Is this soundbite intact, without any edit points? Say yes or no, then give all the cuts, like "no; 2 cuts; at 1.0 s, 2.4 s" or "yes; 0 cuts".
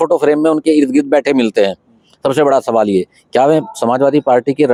yes; 0 cuts